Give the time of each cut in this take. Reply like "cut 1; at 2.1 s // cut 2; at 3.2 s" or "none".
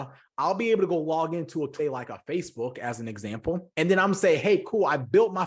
cut 1; at 1.7 s